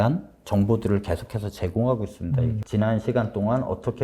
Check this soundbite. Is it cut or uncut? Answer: cut